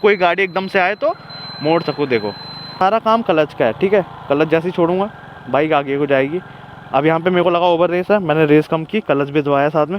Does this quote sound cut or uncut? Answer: cut